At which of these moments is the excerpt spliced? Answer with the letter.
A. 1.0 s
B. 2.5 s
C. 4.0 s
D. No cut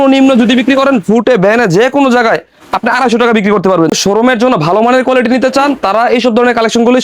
C